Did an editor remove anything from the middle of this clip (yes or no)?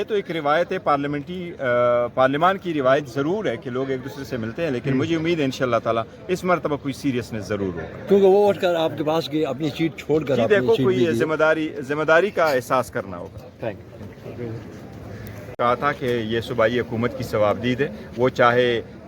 yes